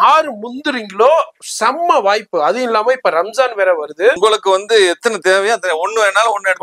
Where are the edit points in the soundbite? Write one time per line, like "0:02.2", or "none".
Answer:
0:04.2